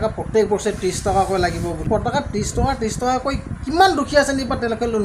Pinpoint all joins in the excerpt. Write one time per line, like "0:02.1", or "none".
0:01.8